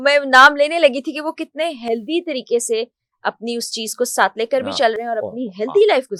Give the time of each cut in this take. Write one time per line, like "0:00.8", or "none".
none